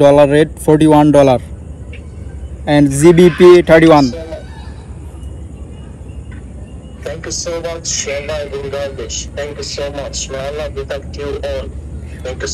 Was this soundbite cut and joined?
no; 0 cuts

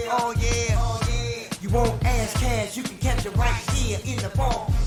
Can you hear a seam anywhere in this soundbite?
no; 0 cuts

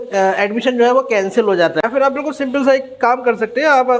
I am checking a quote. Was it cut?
yes; 1 cut; at 1.9 s

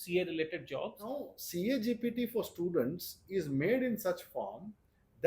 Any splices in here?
yes; 1 cut; at 1.4 s

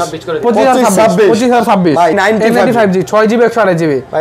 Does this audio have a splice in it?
yes; 1 cut; at 2.2 s

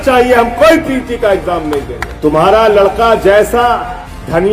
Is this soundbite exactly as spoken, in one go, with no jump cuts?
no; 1 cut; at 2.0 s

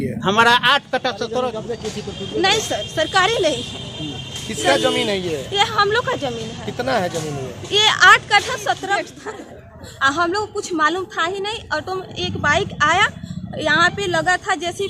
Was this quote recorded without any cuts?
no; 2 cuts; at 1.6 s, 9.1 s

